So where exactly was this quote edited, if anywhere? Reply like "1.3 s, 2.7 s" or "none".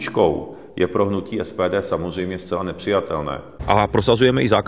3.5 s